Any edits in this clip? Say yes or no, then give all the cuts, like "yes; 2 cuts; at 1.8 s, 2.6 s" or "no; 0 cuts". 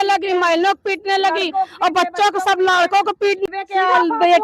yes; 1 cut; at 3.5 s